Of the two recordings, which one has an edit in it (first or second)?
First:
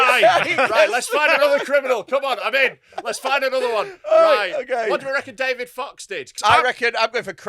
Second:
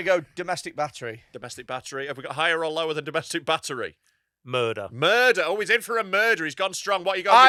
first